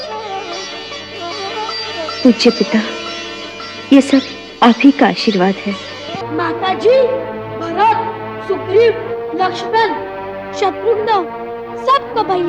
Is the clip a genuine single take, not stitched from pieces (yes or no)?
no